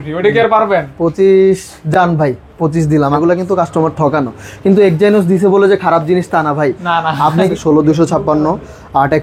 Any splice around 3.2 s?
yes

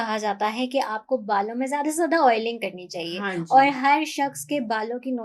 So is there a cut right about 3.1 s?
no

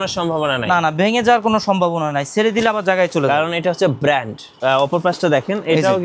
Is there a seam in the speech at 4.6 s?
yes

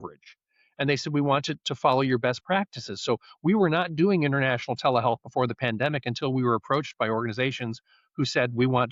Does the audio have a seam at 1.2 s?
no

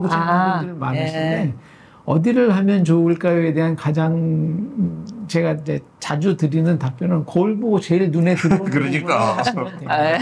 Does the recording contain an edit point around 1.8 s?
no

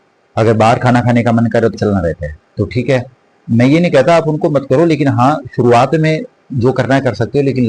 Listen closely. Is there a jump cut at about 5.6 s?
no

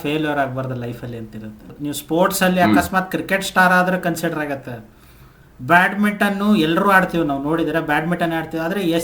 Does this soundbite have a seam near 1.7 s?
yes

